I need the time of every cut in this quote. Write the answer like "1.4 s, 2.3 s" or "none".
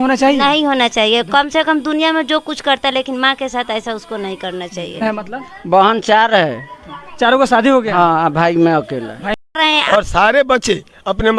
5.0 s, 9.5 s